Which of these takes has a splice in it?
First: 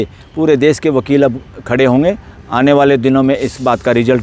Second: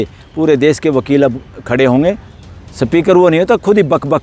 second; 1 cut; at 2.3 s

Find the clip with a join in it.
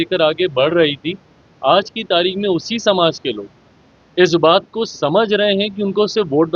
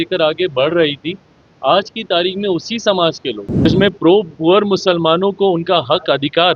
second; 1 cut; at 3.6 s

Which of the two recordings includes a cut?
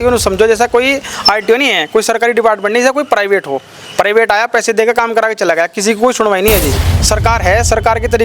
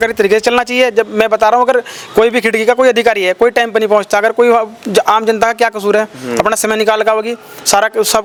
first; 1 cut; at 6.9 s

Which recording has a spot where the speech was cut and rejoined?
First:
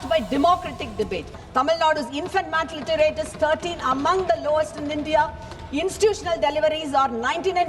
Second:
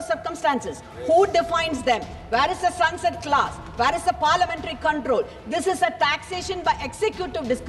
first; 1 cut; at 1.3 s

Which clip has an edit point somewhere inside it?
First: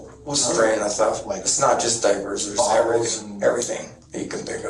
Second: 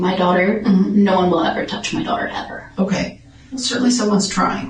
second; 1 cut; at 3.5 s

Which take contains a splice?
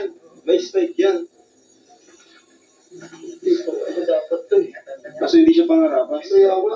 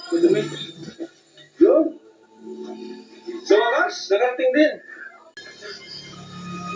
second; 1 cut; at 5.4 s

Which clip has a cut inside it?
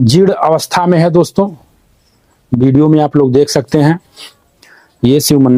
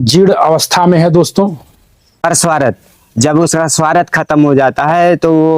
second; 1 cut; at 2.1 s

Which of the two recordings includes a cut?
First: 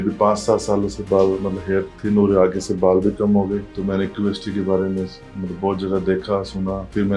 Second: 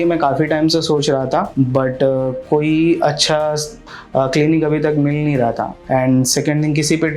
second; 1 cut; at 5.8 s

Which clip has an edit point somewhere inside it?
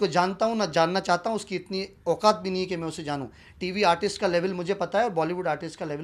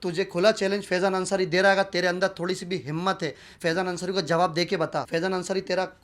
second; 1 cut; at 5.1 s

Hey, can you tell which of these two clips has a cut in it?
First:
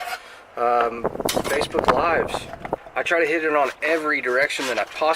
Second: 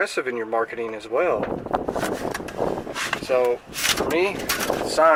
first; 1 cut; at 2.9 s

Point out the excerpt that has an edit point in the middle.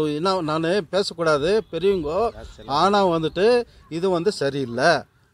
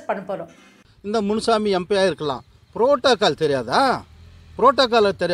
second; 1 cut; at 0.9 s

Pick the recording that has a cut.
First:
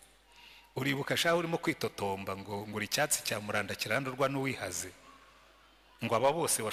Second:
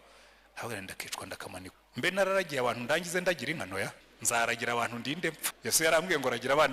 second; 3 cuts; at 1.8 s, 4.1 s, 5.5 s

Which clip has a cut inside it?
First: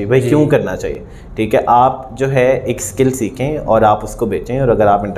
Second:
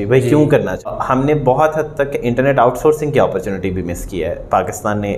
second; 1 cut; at 1.0 s

